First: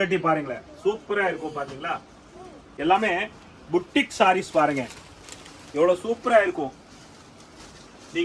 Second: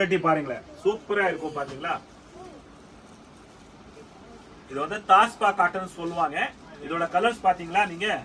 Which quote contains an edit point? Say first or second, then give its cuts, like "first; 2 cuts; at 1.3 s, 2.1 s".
first; 1 cut; at 2.6 s